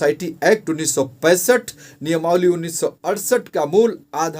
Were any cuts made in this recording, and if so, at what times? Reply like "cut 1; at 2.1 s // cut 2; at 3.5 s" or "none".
none